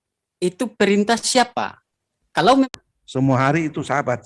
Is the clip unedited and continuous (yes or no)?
no